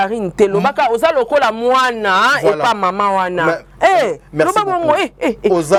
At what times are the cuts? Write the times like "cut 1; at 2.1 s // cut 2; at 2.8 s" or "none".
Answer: none